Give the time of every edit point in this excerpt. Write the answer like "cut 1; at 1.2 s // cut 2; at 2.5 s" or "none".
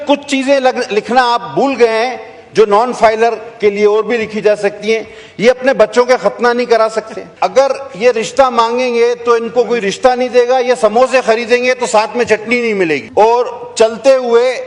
cut 1; at 7.2 s // cut 2; at 13.1 s